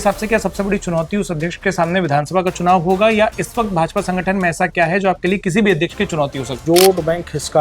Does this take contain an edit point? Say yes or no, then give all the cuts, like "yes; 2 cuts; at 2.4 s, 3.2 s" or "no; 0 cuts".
yes; 1 cut; at 6.5 s